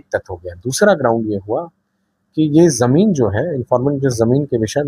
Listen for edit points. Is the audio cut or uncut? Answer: uncut